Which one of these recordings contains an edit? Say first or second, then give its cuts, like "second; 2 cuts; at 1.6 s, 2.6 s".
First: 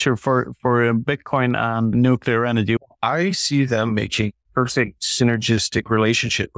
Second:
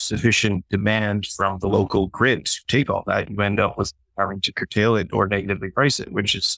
first; 3 cuts; at 1.9 s, 2.8 s, 4.8 s